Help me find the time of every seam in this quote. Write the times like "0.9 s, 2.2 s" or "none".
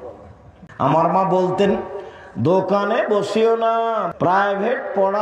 1.0 s, 4.0 s